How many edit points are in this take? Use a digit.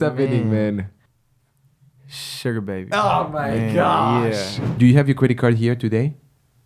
1